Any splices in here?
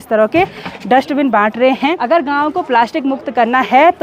yes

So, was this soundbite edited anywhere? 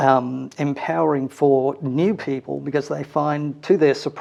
no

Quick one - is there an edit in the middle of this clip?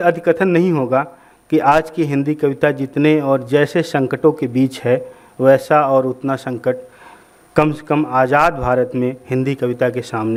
no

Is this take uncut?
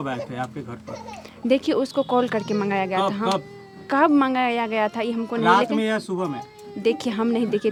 yes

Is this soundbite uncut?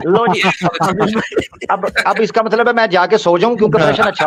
yes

